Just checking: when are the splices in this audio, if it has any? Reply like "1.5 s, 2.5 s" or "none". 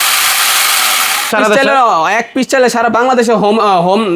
1.3 s